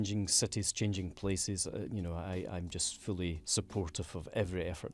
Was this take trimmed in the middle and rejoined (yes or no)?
no